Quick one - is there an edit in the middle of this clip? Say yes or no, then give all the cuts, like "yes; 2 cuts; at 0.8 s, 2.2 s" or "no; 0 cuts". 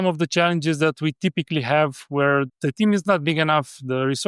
yes; 1 cut; at 2.5 s